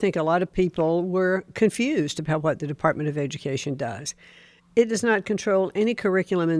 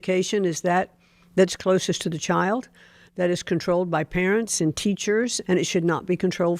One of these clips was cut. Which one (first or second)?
second